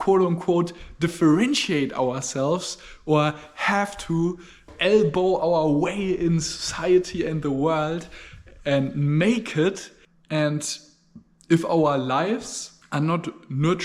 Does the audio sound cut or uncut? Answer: cut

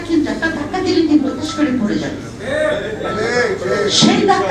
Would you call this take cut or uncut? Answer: cut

